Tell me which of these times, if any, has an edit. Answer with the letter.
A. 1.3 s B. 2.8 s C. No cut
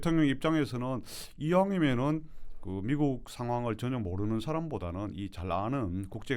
C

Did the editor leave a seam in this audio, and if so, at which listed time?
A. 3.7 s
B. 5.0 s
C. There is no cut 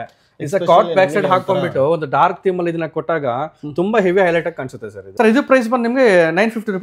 B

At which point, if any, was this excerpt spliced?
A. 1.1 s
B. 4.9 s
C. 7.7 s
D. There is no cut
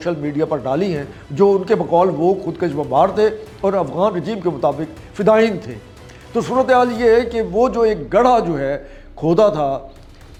D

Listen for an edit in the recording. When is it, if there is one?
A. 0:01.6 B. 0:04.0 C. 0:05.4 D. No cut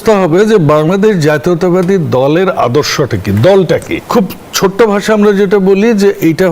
B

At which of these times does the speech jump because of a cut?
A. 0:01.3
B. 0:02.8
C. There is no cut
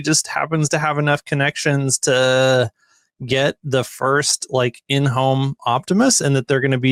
C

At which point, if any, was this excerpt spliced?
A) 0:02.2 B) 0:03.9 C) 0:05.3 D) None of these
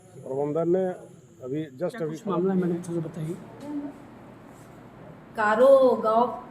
A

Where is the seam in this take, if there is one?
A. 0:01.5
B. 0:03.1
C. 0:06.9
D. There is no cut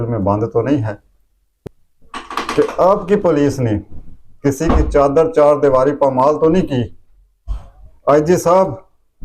A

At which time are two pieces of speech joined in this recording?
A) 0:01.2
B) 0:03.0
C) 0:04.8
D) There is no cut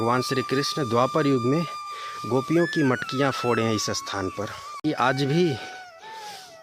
C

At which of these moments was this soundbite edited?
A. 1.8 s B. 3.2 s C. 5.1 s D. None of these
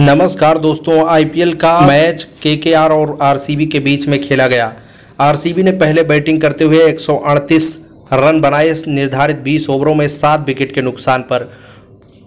A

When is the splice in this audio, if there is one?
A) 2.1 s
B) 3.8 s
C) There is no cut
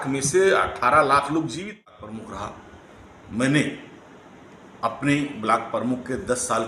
A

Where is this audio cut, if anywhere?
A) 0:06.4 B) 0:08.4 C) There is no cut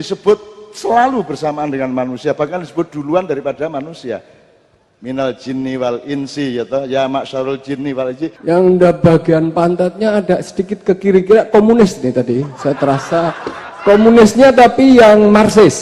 B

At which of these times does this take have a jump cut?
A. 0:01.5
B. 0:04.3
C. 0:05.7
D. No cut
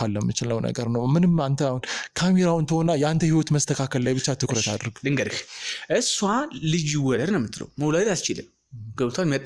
D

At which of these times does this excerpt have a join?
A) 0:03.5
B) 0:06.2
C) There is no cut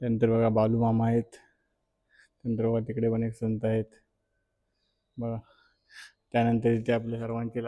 C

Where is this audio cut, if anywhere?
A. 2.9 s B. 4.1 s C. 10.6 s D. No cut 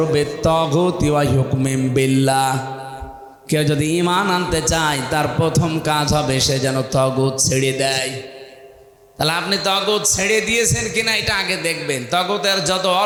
D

